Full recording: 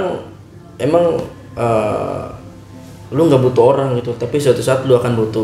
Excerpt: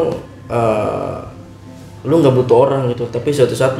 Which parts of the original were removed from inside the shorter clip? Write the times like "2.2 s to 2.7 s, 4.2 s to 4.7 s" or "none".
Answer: none